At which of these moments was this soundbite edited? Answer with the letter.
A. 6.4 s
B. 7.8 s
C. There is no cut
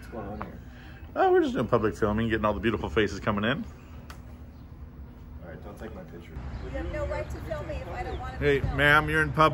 A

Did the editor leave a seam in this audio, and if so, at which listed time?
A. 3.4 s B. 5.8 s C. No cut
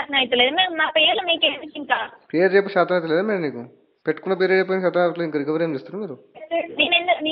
C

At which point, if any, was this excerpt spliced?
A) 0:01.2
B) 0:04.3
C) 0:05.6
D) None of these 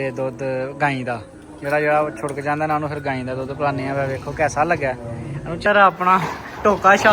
C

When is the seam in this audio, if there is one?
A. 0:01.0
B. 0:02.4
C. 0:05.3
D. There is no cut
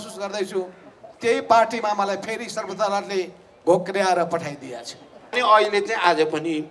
C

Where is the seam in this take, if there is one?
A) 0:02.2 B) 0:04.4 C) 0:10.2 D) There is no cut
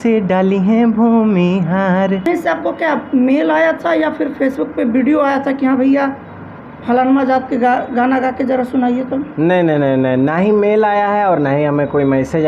A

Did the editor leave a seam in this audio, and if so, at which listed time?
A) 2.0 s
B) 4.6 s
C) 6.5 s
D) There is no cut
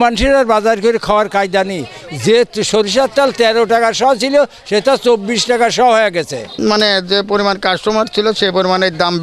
C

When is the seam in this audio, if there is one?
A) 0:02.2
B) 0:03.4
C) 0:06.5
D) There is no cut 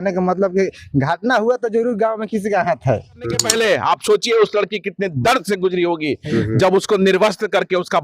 B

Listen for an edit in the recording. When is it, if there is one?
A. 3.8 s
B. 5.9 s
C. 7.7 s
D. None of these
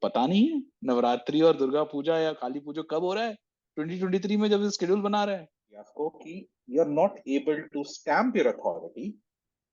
B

